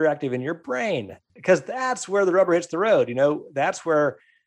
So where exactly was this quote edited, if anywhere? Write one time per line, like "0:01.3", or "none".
0:01.3